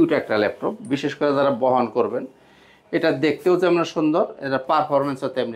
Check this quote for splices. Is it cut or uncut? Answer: uncut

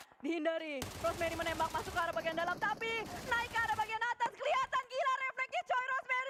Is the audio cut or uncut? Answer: uncut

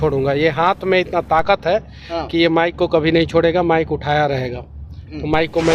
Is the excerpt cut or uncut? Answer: uncut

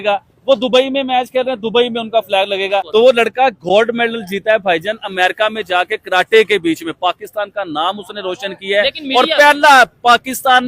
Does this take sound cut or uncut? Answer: cut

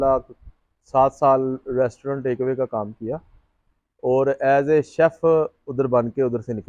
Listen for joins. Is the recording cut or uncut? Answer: uncut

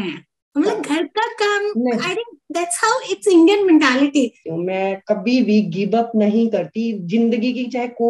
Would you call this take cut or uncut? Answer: cut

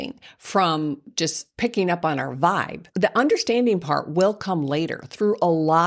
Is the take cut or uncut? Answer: cut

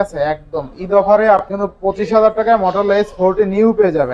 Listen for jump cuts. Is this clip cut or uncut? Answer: cut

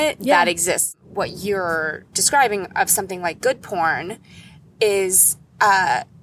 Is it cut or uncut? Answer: cut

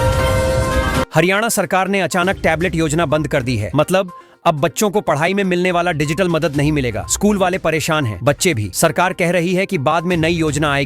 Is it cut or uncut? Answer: cut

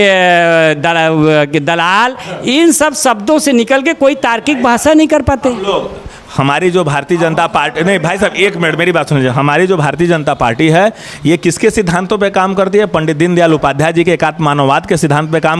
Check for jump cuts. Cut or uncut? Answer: uncut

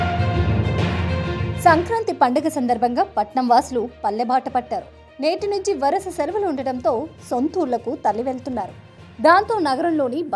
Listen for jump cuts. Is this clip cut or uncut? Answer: cut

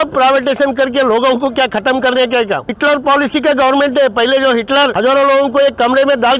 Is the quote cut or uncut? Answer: cut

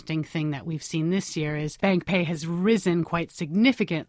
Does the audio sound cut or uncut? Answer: cut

